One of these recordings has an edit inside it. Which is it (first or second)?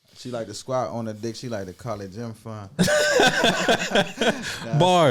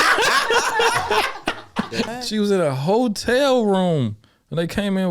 second